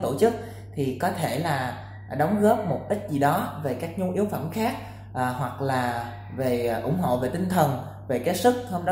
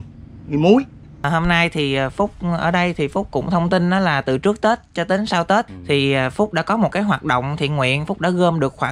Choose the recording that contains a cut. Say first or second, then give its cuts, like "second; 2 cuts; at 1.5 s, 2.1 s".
second; 2 cuts; at 1.3 s, 5.7 s